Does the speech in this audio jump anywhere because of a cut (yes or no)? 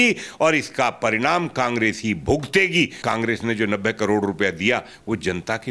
yes